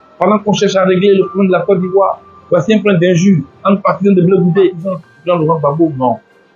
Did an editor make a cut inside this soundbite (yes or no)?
yes